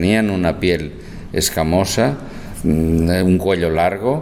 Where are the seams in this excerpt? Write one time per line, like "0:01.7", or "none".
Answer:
none